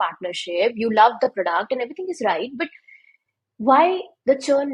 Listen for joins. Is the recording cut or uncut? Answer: uncut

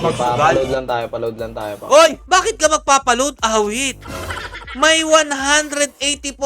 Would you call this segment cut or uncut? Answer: uncut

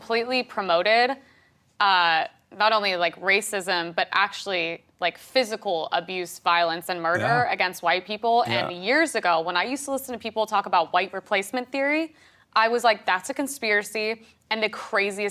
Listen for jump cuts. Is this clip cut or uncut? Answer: uncut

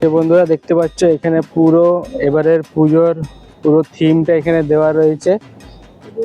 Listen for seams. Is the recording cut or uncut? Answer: uncut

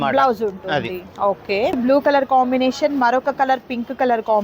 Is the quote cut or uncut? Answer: cut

